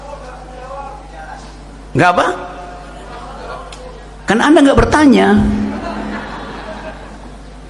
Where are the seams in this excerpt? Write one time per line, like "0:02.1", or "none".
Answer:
none